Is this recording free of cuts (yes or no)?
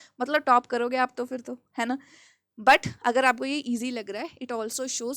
yes